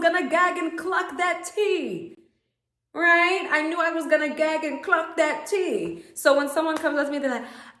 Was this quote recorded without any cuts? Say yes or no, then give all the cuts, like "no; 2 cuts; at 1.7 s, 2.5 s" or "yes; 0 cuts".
yes; 0 cuts